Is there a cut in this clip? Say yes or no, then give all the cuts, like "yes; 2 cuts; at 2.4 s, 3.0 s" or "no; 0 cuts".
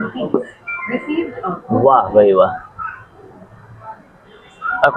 no; 0 cuts